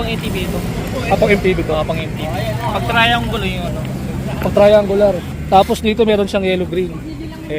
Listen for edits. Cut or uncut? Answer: cut